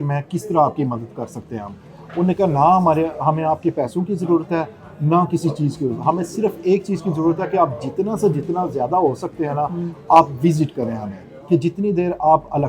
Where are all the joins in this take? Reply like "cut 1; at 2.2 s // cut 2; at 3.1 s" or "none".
none